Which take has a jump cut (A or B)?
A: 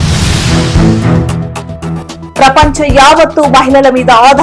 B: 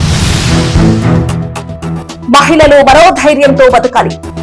A